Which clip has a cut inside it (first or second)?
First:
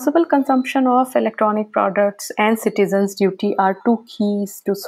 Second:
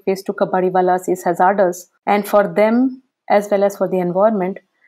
second